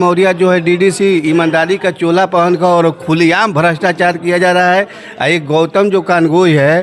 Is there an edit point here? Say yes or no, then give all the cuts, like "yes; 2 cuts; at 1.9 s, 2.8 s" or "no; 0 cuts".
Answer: no; 0 cuts